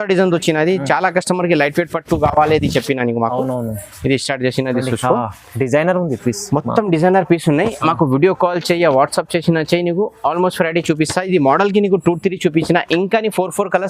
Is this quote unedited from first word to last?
yes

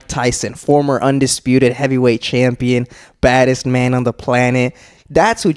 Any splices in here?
no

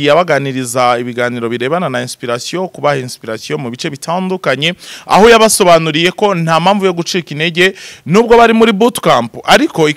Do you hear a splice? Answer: no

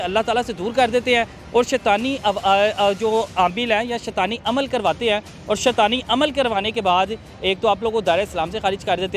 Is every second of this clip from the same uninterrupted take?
yes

